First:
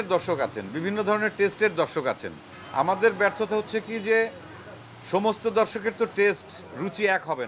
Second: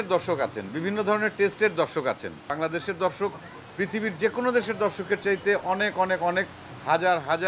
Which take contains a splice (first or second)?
second